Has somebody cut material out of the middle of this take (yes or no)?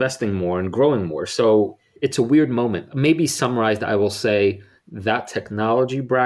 yes